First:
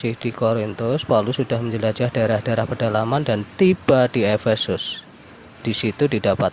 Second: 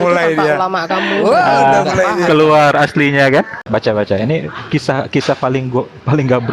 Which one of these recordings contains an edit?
second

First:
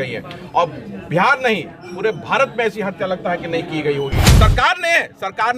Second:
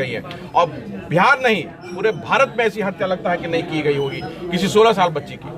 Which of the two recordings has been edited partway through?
first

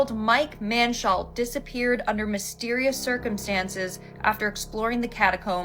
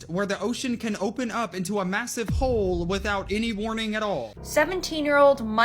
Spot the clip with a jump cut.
second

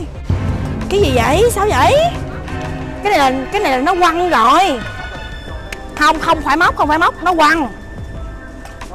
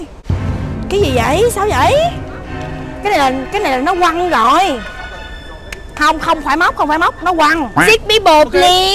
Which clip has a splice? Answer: second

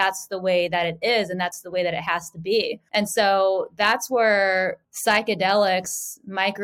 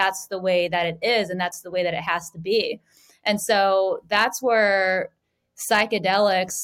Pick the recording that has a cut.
first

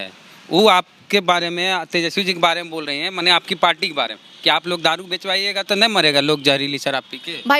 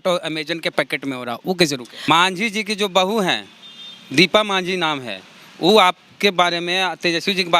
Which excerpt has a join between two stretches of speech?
second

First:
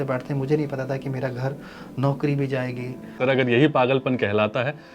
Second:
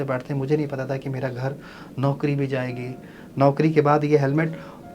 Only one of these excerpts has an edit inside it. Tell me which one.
first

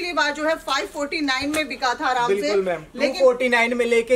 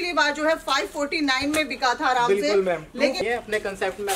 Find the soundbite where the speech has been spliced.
second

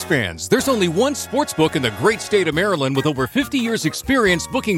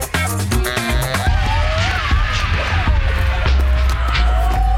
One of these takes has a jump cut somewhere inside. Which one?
second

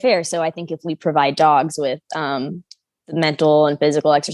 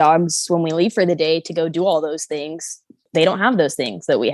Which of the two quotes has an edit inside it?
second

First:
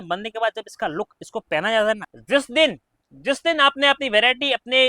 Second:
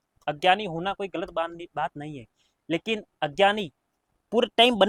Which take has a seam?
first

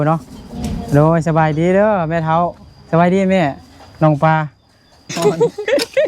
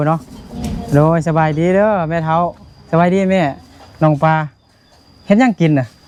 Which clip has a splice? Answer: first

